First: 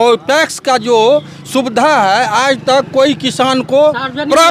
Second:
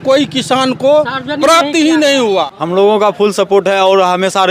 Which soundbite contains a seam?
second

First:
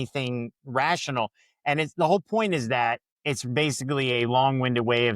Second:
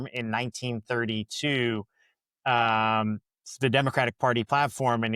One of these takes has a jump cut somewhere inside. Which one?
first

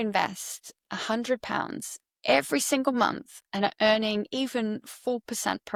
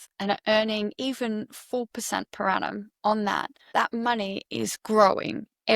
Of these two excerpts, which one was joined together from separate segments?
second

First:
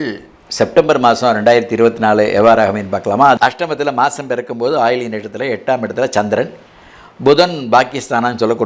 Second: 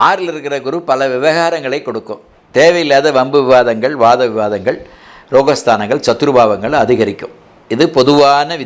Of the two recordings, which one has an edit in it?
first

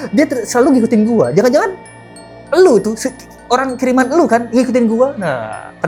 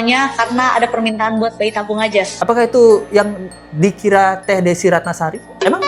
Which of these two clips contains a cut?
second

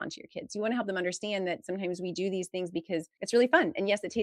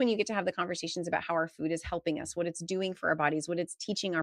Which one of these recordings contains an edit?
first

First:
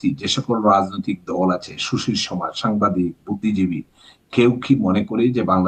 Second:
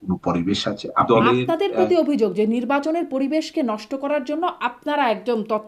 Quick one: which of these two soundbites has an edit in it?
second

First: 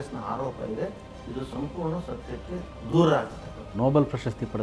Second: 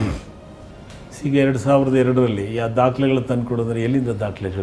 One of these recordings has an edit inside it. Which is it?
first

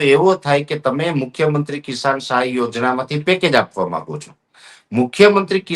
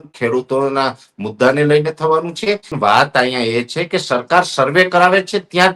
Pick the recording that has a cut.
second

